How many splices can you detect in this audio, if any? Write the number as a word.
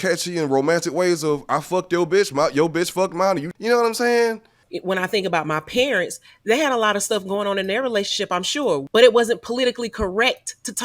three